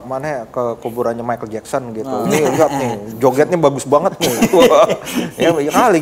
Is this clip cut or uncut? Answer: uncut